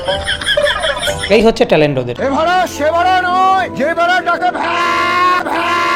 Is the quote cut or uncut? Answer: uncut